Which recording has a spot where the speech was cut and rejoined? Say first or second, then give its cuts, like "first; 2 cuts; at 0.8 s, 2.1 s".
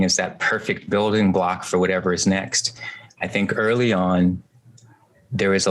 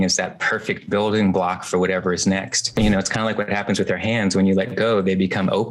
second; 1 cut; at 2.8 s